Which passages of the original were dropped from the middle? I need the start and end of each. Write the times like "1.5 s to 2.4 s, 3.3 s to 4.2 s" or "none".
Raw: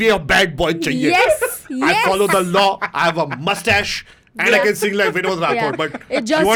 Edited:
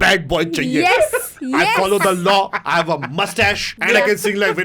4.0 s to 4.3 s